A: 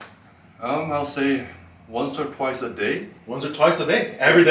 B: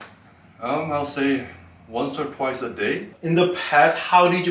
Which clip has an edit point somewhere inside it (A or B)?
B